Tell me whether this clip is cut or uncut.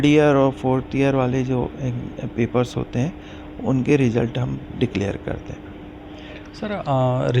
uncut